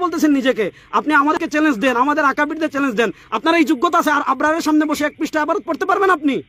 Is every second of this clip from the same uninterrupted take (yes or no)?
no